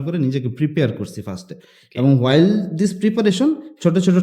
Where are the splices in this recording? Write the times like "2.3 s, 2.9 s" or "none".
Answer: none